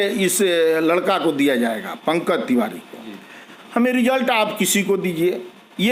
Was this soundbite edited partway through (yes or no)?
no